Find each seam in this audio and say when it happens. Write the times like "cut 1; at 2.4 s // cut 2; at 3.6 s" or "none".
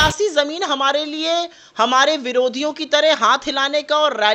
none